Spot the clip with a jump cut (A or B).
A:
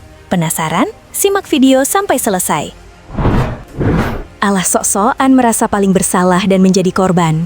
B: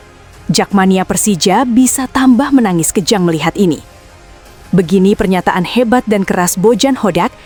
A